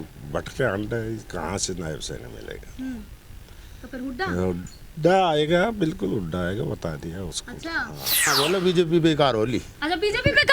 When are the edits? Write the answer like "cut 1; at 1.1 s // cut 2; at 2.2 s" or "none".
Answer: cut 1; at 8.3 s

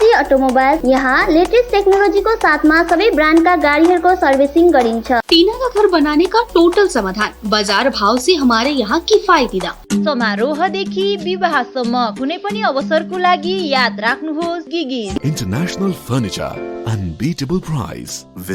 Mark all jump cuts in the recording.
cut 1; at 0.8 s // cut 2; at 5.2 s // cut 3; at 9.8 s // cut 4; at 15.2 s

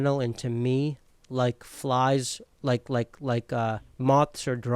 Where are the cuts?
none

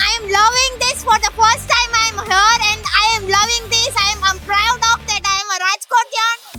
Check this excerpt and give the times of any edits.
none

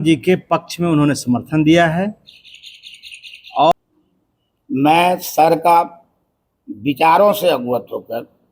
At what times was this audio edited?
cut 1; at 3.7 s

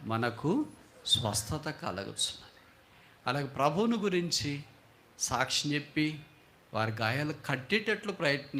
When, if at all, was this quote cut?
none

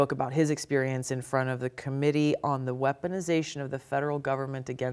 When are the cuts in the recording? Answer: none

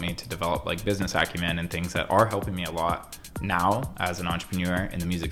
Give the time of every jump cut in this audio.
none

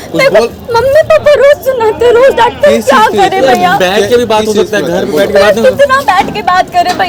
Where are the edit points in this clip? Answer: none

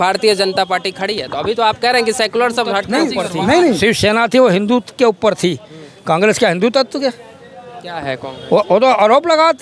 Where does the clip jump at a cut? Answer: cut 1; at 3.8 s

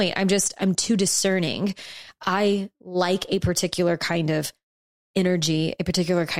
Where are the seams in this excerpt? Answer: none

